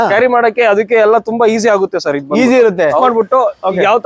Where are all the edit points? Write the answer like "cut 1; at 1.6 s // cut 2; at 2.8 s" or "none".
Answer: cut 1; at 3.0 s